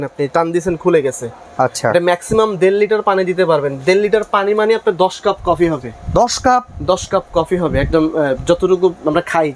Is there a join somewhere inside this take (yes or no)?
no